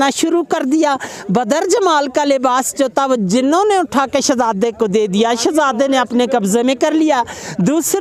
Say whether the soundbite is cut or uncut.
uncut